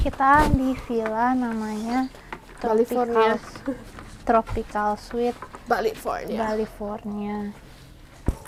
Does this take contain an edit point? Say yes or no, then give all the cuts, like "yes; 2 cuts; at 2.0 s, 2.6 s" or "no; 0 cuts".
no; 0 cuts